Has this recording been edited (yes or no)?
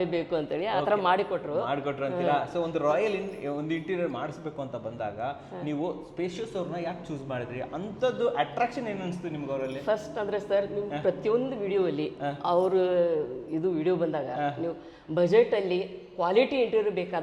no